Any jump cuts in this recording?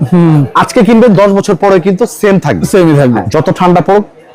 yes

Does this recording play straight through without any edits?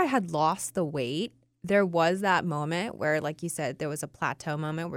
yes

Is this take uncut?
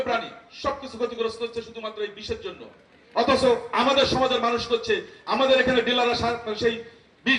yes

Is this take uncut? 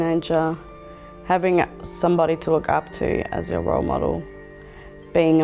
yes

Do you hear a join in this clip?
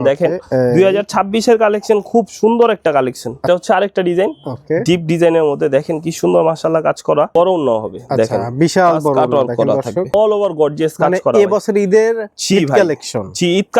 yes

